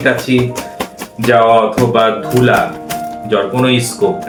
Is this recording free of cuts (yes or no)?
yes